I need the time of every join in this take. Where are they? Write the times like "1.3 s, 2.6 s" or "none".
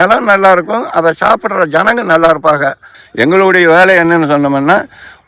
2.9 s